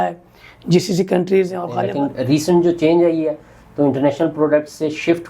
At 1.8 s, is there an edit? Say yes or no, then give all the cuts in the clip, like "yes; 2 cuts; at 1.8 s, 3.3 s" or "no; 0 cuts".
yes; 1 cut; at 1.8 s